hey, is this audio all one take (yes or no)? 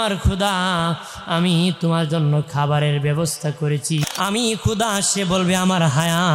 no